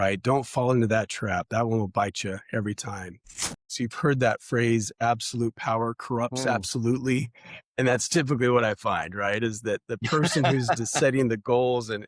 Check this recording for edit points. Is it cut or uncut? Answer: cut